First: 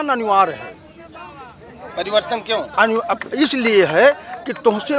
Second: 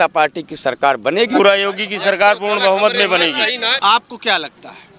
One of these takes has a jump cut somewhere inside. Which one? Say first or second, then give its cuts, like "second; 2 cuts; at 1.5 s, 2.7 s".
second; 2 cuts; at 1.3 s, 3.7 s